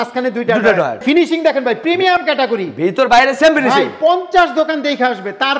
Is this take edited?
yes; 1 cut; at 1.0 s

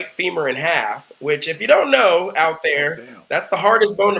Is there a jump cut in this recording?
no; 0 cuts

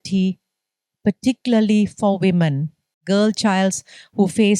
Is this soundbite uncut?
no; 1 cut; at 3.0 s

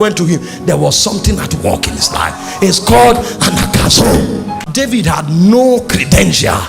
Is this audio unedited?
no; 1 cut; at 4.6 s

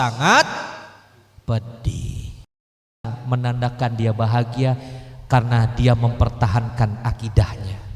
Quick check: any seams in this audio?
yes; 1 cut; at 3.1 s

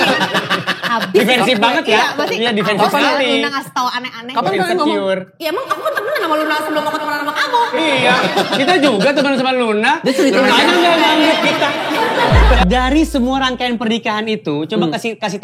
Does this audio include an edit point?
yes; 1 cut; at 12.6 s

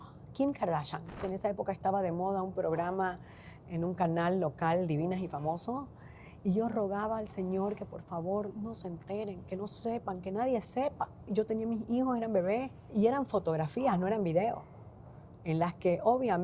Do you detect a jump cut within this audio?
yes; 3 cuts; at 1.1 s, 11.3 s, 12.9 s

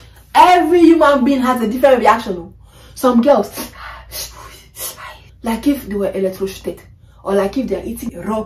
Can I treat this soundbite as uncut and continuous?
no; 1 cut; at 5.3 s

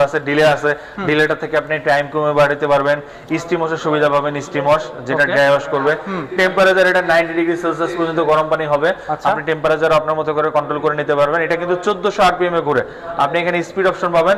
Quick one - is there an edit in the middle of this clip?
no; 0 cuts

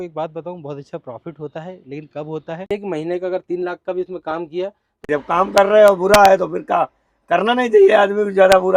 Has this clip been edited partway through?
yes; 2 cuts; at 2.7 s, 4.9 s

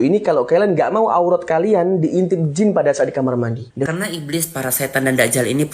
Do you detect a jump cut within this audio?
yes; 1 cut; at 3.9 s

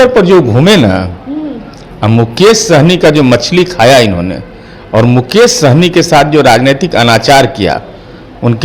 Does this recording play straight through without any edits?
yes; 0 cuts

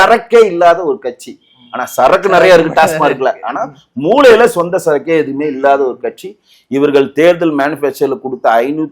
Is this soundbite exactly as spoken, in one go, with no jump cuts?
yes; 0 cuts

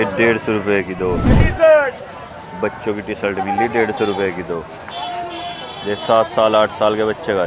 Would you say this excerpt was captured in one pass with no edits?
no; 1 cut; at 1.5 s

